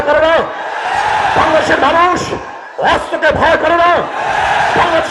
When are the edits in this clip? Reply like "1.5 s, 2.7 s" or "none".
none